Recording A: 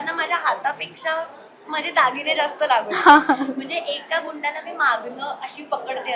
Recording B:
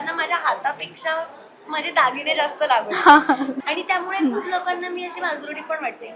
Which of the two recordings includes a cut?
B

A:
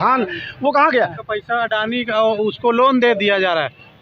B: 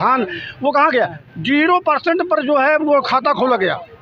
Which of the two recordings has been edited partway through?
A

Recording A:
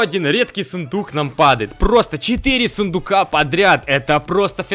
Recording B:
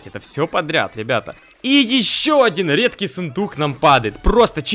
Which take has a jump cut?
B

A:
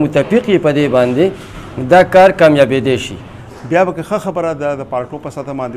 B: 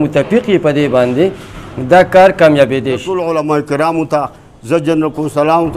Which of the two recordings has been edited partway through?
B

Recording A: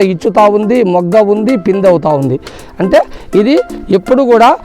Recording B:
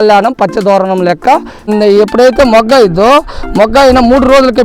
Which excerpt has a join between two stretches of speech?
B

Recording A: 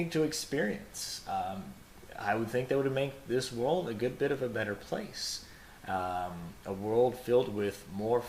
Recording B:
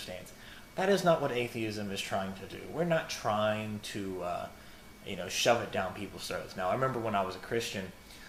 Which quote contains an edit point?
A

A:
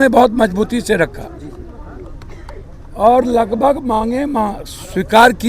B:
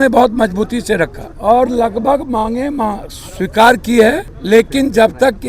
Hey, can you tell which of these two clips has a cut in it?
B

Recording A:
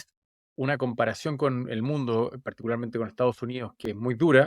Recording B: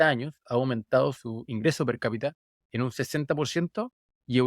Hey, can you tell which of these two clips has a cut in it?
B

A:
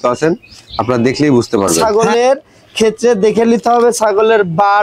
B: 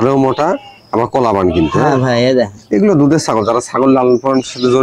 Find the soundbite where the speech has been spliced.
A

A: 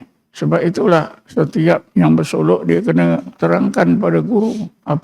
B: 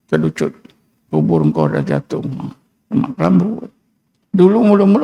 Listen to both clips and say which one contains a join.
A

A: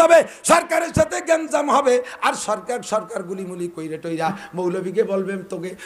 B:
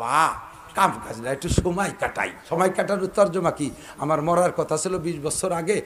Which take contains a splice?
B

